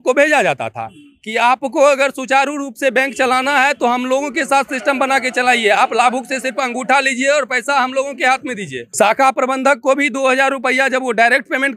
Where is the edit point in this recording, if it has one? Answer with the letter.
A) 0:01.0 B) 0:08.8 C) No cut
B